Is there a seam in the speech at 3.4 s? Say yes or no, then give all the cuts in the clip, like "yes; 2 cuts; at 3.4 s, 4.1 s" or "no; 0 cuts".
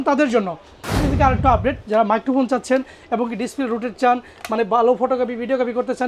no; 1 cut; at 0.9 s